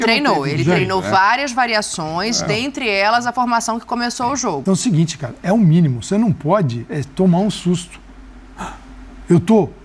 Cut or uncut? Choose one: cut